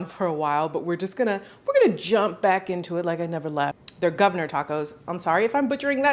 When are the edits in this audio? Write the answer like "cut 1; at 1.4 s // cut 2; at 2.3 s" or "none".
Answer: cut 1; at 3.8 s